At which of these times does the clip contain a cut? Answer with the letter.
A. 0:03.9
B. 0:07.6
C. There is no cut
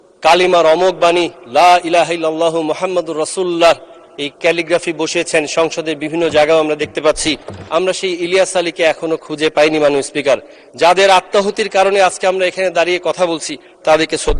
B